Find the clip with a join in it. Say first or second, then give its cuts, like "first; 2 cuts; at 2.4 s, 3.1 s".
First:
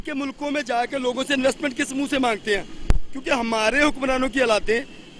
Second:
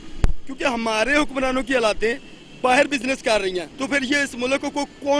second; 1 cut; at 3.7 s